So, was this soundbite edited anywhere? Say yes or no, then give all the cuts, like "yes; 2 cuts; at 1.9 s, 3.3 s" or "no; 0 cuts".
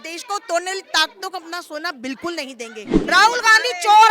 yes; 1 cut; at 3.0 s